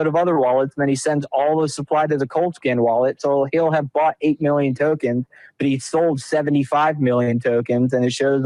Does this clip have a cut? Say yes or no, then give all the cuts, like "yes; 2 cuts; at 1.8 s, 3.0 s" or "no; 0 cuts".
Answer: no; 0 cuts